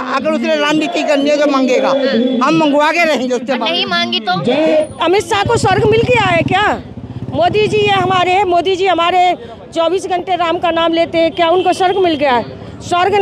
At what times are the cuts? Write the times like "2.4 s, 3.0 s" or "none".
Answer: 4.9 s